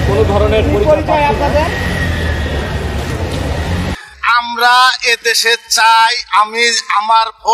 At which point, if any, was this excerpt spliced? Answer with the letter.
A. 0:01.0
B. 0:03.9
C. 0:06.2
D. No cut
B